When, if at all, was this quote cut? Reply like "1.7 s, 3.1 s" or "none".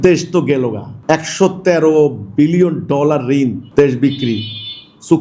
none